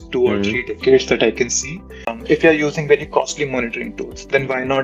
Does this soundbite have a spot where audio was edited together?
yes; 1 cut; at 2.2 s

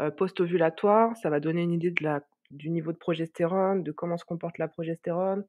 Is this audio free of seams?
yes; 0 cuts

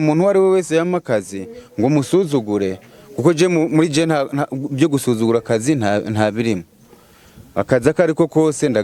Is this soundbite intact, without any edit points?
yes; 0 cuts

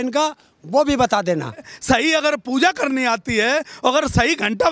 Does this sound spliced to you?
yes; 1 cut; at 1.7 s

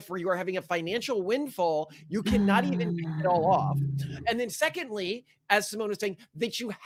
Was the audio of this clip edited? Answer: no; 0 cuts

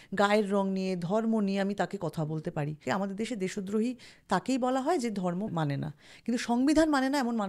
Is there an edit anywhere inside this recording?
yes; 2 cuts; at 2.8 s, 5.5 s

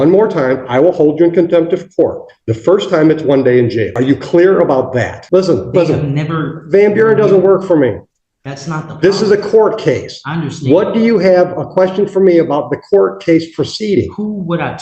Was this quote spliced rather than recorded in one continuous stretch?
yes; 2 cuts; at 3.9 s, 5.2 s

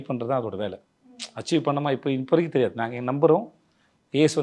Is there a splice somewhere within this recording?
no; 0 cuts

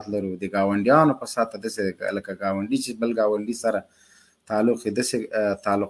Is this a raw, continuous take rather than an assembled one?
yes; 0 cuts

